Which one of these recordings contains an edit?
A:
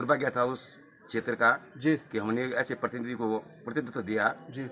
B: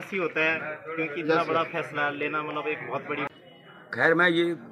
B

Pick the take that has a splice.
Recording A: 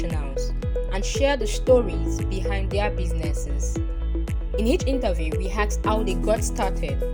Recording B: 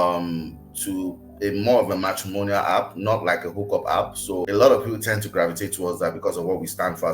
B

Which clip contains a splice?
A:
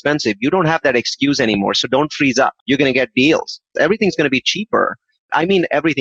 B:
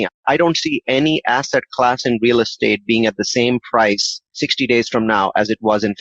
A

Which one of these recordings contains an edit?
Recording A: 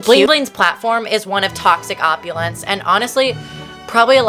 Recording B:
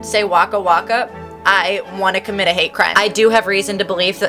B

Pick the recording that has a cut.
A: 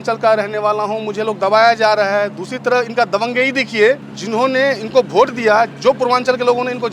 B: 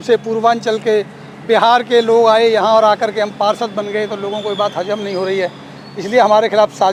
A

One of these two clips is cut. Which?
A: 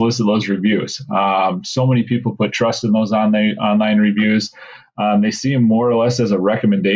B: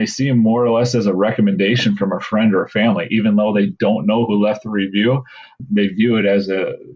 B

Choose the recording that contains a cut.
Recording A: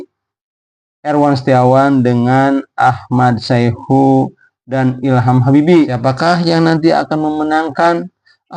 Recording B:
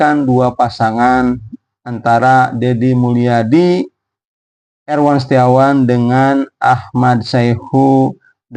A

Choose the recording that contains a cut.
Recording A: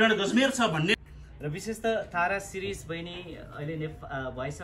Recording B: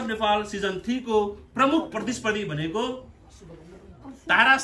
A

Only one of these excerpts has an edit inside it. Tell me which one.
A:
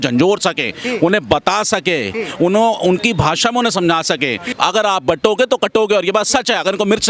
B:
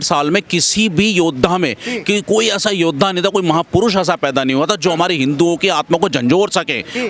A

